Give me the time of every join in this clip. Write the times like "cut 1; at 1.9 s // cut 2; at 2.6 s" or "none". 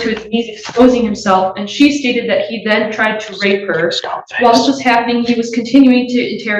none